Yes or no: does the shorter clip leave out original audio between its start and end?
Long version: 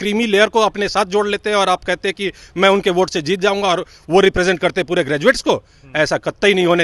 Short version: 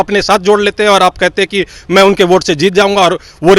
no